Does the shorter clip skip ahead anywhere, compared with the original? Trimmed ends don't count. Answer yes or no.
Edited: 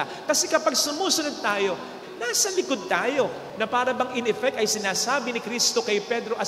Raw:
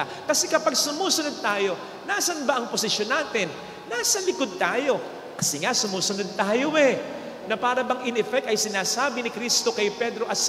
yes